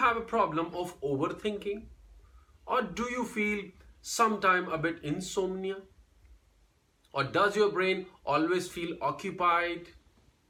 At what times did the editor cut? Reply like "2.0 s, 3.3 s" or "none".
none